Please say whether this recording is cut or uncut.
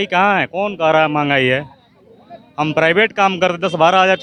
uncut